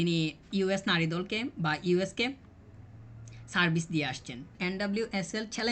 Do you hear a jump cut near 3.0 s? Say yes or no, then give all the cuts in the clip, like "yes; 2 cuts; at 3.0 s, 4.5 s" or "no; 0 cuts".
no; 1 cut; at 4.6 s